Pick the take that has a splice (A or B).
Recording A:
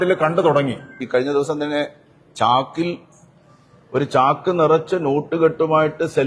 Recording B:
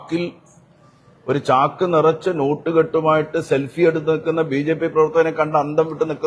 A